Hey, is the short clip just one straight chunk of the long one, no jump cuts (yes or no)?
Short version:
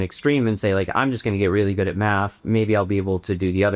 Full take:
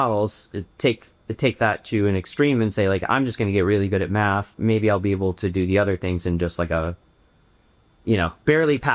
yes